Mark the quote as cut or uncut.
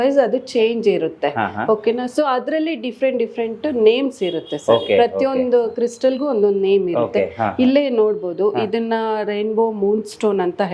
uncut